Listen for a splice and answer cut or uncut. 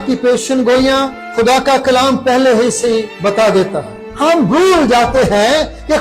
cut